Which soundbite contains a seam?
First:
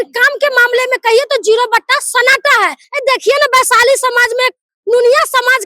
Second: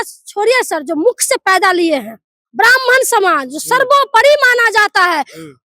first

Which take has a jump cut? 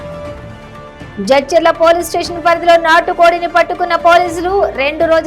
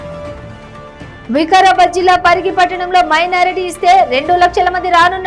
first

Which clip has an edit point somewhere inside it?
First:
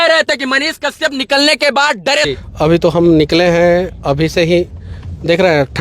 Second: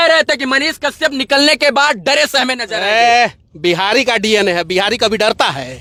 first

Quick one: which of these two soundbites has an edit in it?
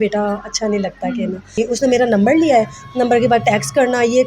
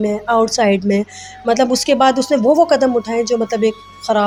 first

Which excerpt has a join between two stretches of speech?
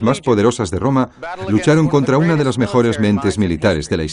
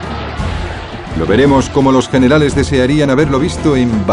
second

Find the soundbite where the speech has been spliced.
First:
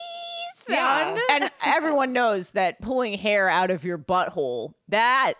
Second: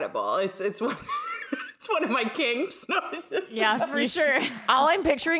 first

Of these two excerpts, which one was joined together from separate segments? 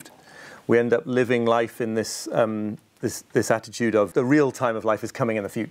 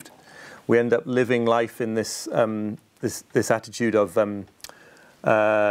first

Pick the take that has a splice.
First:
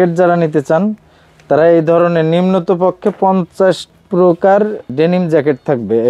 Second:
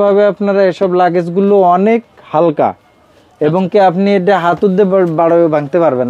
first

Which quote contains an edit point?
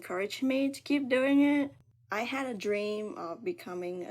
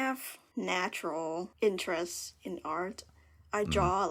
first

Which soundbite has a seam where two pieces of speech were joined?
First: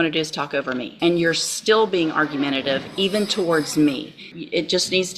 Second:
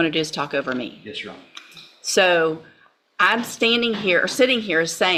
first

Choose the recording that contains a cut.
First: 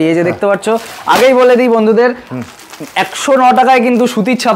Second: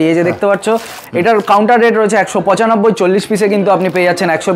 second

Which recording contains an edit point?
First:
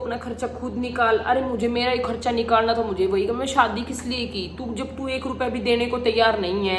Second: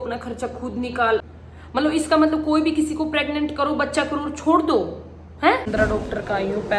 second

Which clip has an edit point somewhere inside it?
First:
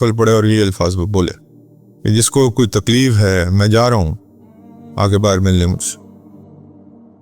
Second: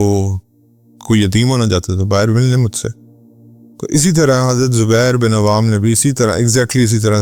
first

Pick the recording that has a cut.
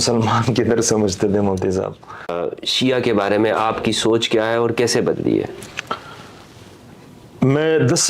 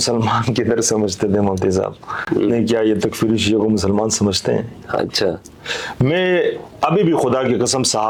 first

